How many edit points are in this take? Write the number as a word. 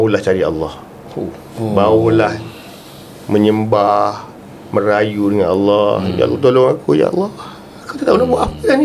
one